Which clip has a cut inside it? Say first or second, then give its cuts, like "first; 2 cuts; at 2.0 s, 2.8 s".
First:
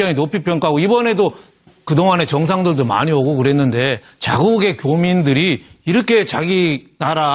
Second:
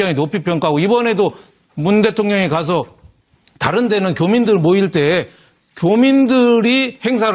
second; 1 cut; at 1.7 s